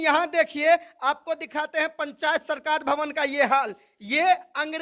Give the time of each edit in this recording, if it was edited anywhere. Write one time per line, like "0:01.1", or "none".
none